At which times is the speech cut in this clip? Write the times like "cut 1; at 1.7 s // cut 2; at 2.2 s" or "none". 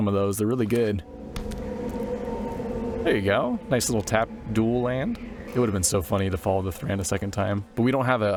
none